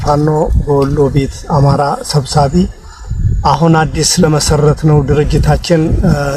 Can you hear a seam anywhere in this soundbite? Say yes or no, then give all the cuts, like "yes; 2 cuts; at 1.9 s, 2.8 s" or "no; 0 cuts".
no; 0 cuts